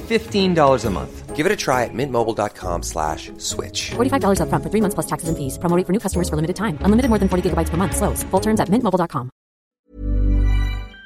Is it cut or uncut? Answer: cut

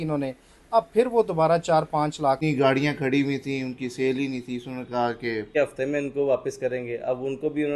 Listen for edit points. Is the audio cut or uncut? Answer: cut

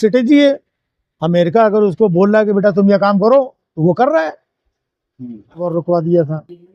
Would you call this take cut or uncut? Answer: cut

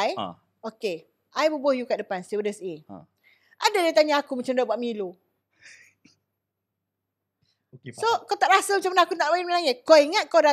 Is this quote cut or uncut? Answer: uncut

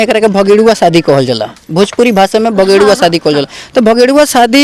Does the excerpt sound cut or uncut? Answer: uncut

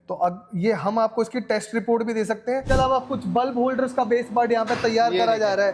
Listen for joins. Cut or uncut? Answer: cut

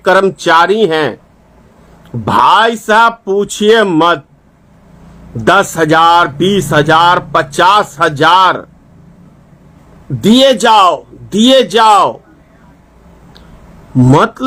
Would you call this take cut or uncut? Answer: uncut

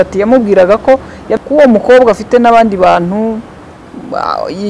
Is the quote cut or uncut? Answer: cut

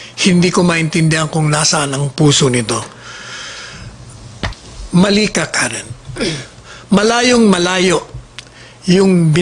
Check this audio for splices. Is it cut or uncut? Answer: cut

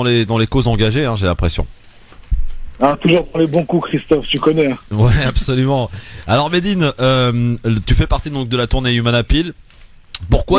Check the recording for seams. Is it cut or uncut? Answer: cut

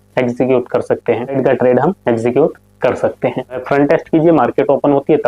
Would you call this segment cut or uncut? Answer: cut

